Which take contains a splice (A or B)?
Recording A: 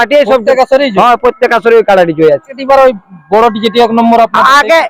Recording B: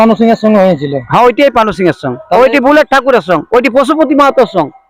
A